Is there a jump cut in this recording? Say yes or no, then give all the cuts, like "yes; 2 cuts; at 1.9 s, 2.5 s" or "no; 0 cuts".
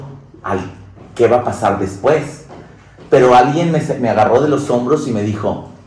no; 0 cuts